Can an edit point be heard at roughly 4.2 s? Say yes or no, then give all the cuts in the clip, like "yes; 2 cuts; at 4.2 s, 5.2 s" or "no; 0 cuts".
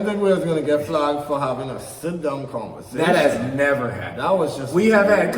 no; 0 cuts